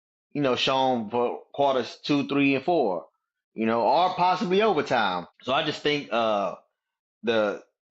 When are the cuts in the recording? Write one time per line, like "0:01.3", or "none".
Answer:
0:05.3